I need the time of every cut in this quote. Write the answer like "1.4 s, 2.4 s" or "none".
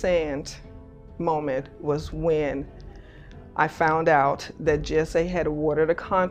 none